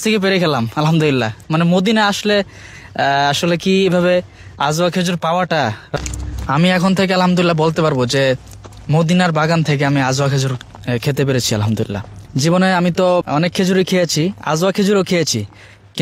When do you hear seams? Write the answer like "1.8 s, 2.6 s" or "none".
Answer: 6.0 s, 12.2 s, 13.2 s